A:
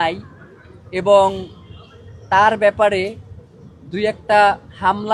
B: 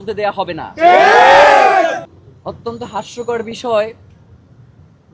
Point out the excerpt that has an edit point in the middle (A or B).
B